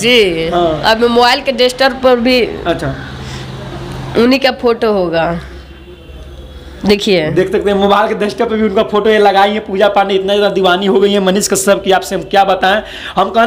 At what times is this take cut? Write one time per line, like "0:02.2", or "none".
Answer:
none